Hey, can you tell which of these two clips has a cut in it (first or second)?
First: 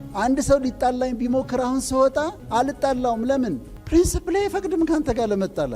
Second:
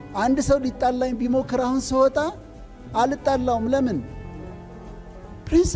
first